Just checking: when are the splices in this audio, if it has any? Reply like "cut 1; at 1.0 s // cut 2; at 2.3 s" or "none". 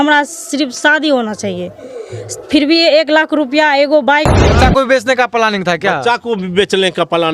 cut 1; at 4.5 s